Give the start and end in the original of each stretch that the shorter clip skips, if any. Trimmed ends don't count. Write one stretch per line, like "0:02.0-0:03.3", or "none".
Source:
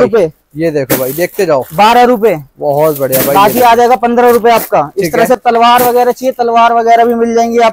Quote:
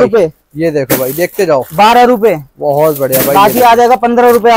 none